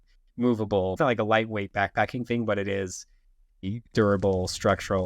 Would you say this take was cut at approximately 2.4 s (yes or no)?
no